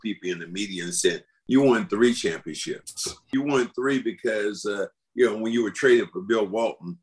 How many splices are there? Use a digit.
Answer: 2